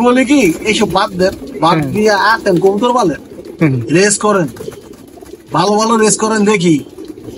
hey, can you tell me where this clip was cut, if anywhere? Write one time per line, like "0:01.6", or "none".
none

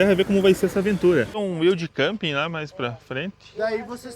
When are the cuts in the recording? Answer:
0:01.4

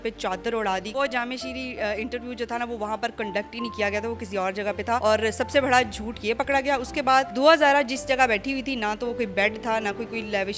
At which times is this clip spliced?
0:00.9
0:05.0
0:07.3

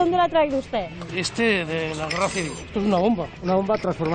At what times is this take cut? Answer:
0:02.7

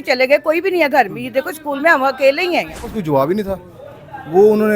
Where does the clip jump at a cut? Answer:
0:02.9

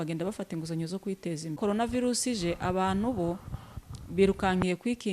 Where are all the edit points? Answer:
0:01.6

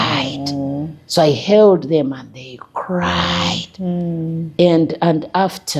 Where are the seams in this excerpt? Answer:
none

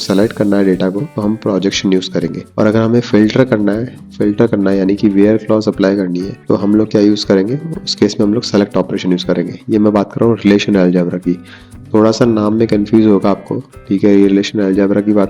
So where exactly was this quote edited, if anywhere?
0:01.1
0:02.4
0:06.3

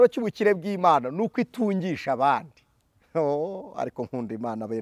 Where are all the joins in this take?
none

